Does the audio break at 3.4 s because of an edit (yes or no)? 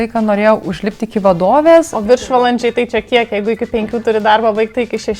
no